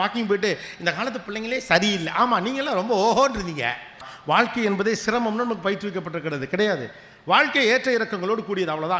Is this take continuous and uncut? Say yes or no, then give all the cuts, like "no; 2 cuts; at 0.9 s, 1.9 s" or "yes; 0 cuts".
no; 1 cut; at 4.1 s